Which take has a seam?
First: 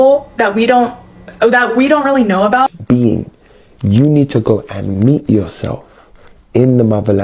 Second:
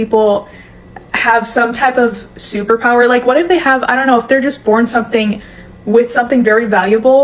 first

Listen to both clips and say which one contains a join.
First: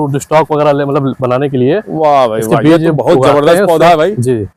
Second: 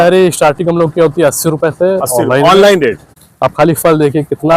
second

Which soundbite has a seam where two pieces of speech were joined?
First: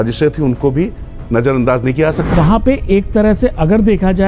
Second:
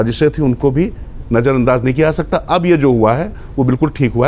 first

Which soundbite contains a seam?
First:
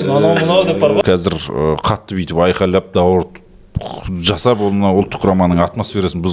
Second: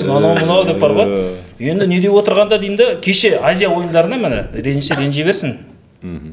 first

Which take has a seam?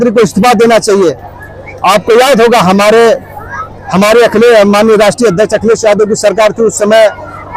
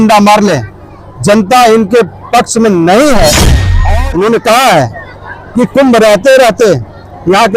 second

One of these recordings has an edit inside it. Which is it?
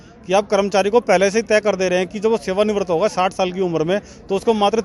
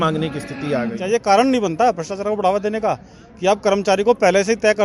second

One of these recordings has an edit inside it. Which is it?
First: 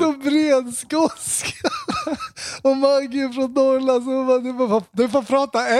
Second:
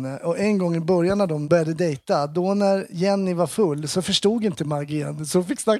second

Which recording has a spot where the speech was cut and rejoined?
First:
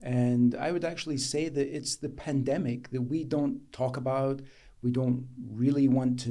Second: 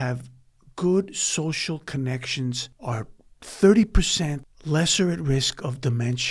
second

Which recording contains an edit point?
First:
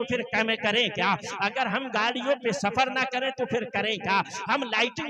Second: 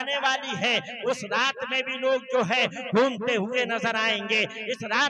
second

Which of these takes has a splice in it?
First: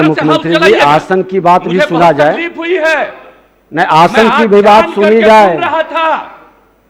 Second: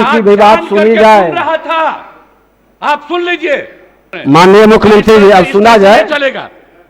second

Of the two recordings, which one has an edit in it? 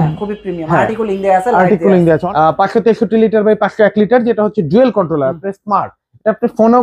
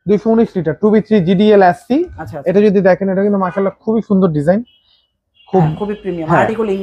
first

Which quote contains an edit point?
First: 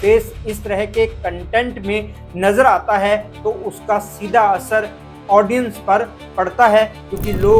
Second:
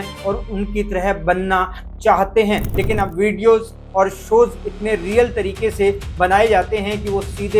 second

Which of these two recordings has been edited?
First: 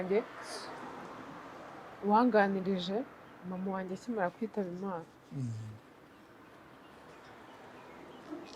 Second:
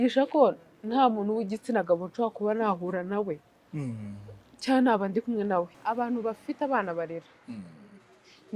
second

